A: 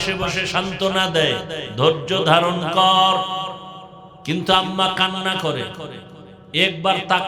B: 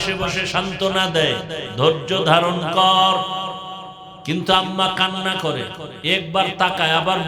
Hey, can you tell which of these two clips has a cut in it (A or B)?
B